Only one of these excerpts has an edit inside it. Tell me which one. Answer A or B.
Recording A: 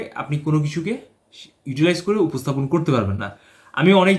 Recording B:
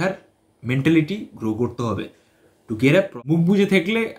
B